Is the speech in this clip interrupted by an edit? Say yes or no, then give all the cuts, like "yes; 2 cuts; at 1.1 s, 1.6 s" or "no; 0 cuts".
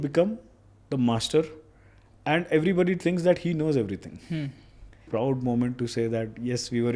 yes; 1 cut; at 5.0 s